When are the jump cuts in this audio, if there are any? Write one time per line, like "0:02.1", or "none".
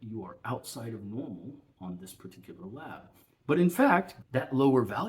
0:04.2